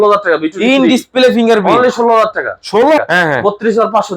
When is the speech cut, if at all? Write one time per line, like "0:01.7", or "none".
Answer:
0:03.0